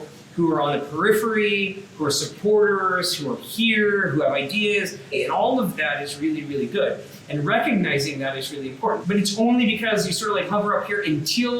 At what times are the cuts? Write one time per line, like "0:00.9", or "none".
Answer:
0:05.1
0:09.0